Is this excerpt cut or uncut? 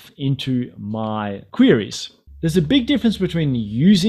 cut